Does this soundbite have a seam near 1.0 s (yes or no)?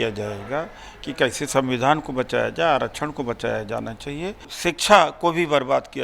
no